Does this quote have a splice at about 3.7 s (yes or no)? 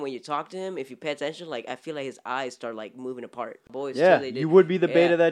yes